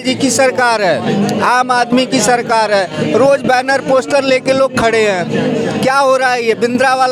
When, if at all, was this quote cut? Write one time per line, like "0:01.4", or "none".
none